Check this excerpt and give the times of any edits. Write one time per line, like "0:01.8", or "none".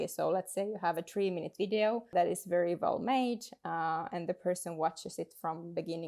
0:02.1